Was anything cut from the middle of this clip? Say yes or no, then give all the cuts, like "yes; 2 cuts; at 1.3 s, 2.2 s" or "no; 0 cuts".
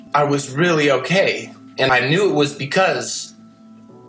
yes; 1 cut; at 1.9 s